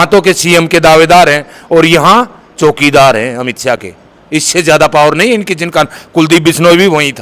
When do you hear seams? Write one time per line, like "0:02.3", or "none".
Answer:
none